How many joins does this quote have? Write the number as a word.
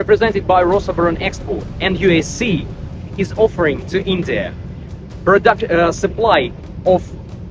zero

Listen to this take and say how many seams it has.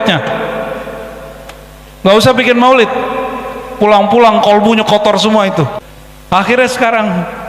one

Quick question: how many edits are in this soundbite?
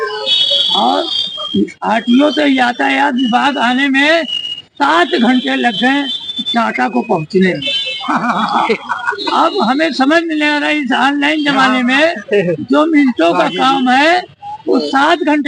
zero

